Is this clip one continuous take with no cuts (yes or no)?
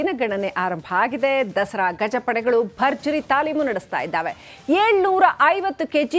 yes